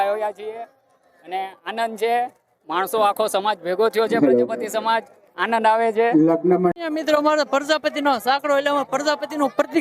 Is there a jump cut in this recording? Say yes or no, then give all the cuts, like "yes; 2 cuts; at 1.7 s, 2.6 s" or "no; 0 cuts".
yes; 1 cut; at 6.7 s